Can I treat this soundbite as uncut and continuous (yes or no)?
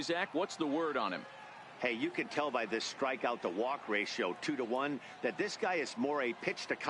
no